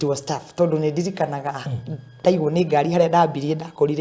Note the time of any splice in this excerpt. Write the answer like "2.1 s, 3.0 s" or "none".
2.2 s